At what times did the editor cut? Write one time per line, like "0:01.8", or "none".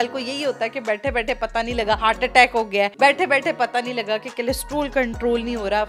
none